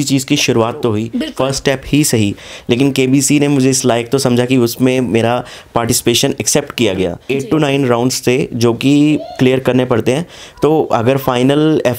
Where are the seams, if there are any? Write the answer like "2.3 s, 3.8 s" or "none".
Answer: 1.2 s, 7.2 s